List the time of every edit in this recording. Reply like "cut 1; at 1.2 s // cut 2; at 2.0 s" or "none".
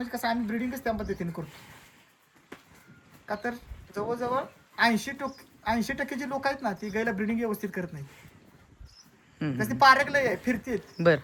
none